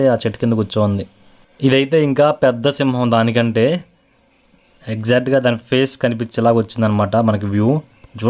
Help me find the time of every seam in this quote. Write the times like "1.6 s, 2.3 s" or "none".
none

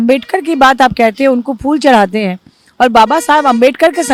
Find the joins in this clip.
none

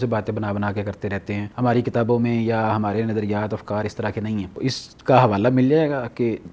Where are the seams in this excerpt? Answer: 1.5 s, 4.6 s

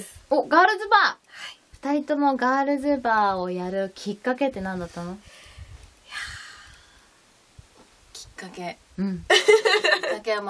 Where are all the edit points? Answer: 6.3 s

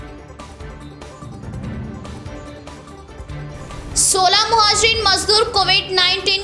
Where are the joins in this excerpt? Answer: none

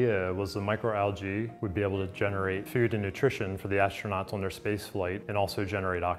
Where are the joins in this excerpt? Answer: none

